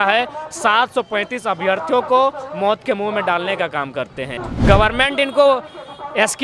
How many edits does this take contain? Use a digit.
1